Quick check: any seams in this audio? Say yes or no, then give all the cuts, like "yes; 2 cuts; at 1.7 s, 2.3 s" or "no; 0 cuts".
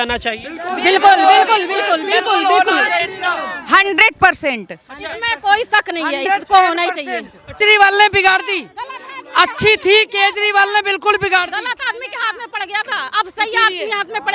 yes; 1 cut; at 7.6 s